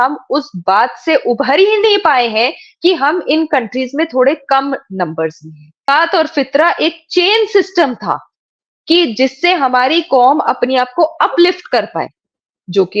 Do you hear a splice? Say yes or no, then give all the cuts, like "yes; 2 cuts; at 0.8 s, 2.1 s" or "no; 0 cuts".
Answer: yes; 1 cut; at 5.9 s